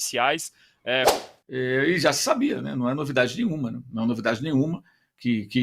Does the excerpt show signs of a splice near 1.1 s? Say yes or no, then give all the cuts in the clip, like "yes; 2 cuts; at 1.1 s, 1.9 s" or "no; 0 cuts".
yes; 1 cut; at 1.1 s